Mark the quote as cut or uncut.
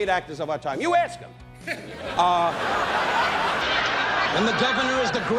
cut